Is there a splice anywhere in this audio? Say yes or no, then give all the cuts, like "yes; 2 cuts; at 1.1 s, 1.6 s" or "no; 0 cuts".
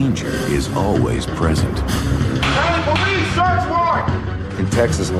yes; 1 cut; at 1.6 s